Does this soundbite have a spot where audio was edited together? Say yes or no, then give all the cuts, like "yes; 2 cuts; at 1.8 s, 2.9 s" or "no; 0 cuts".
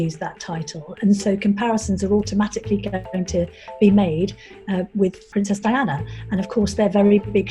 yes; 1 cut; at 5.3 s